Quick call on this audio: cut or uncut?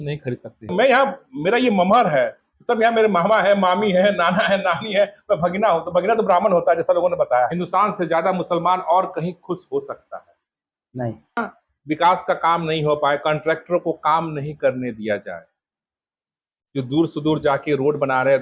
cut